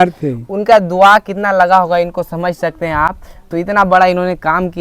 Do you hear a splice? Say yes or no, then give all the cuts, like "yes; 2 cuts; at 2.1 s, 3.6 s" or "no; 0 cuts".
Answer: no; 0 cuts